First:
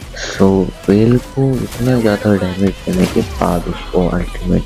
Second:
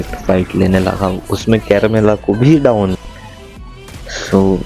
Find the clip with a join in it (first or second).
second